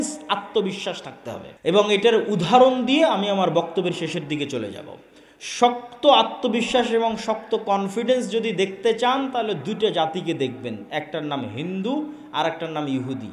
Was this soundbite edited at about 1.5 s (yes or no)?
yes